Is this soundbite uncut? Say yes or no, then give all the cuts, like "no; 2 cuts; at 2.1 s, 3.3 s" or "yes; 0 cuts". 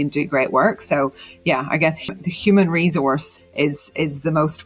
no; 2 cuts; at 2.1 s, 3.4 s